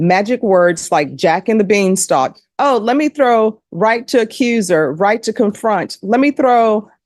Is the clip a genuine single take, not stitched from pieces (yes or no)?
yes